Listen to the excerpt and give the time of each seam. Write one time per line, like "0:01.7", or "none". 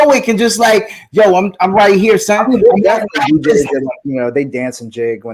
none